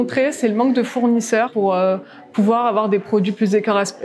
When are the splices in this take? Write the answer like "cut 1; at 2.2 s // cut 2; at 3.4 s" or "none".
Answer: cut 1; at 1.5 s